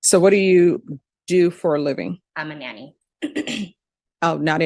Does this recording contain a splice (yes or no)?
yes